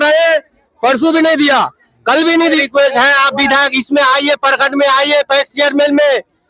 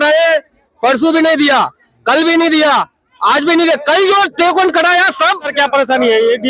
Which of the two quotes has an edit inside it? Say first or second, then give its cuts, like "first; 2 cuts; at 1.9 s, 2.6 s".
first; 1 cut; at 2.6 s